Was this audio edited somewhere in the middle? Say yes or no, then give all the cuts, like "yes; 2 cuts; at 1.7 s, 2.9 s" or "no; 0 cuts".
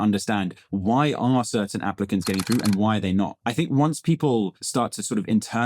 yes; 2 cuts; at 3.4 s, 4.6 s